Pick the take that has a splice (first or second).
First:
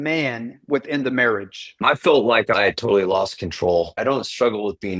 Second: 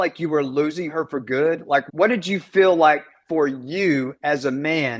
first